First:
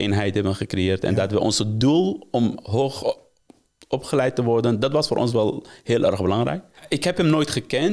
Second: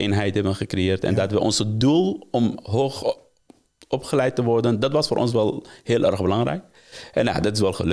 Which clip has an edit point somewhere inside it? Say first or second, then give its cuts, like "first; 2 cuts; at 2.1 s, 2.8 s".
first; 1 cut; at 6.8 s